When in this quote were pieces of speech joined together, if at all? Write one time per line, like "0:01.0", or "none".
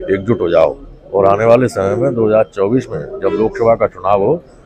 none

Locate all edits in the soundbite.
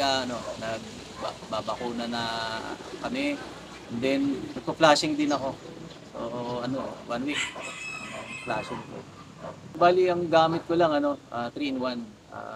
0:09.7

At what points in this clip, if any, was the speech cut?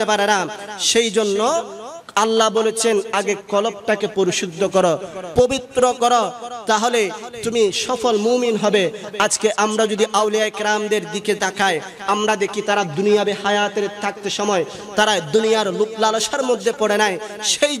none

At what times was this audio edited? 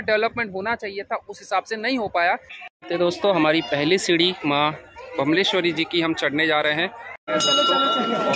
0:02.5
0:07.1

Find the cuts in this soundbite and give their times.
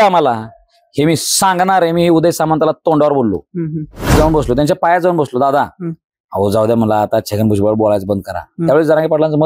0:04.1

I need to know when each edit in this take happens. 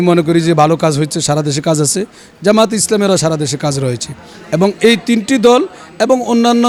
none

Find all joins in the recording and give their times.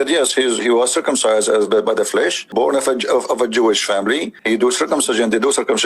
0:02.4
0:04.3

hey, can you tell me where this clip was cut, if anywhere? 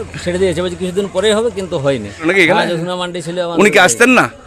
0:02.3

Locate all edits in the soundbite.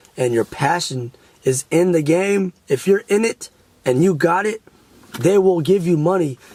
none

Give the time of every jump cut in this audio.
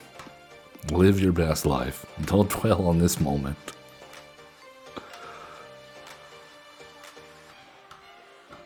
none

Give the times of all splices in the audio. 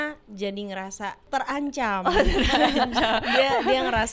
0:01.2

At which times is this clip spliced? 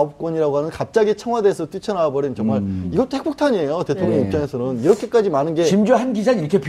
none

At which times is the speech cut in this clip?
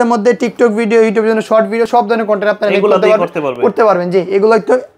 none

